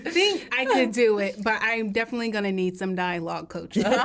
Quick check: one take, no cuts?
yes; 0 cuts

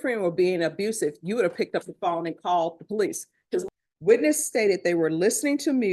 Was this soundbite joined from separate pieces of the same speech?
yes; 1 cut; at 3.6 s

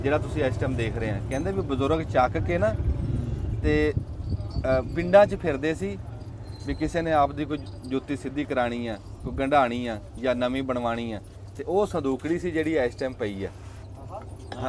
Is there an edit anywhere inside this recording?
no; 0 cuts

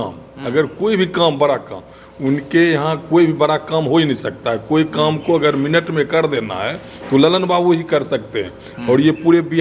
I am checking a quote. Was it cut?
no; 0 cuts

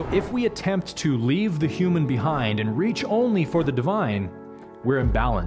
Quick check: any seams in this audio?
no; 0 cuts

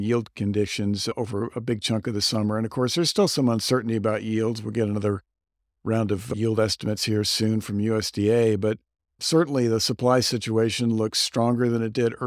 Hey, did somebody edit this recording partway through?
no; 0 cuts

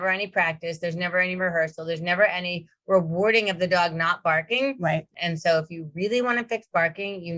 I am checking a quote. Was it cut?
yes; 1 cut; at 5.1 s

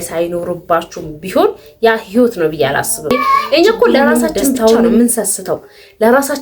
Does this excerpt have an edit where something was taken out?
yes; 1 cut; at 3.1 s

